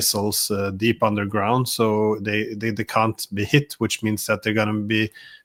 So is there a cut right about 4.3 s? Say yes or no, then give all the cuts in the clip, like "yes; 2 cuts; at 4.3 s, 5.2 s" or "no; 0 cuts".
no; 0 cuts